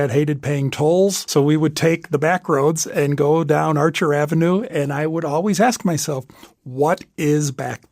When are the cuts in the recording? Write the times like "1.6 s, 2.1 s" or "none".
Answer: 1.2 s